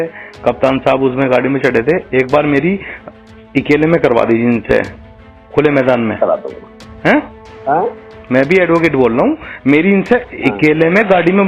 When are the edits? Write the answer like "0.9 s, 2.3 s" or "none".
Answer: none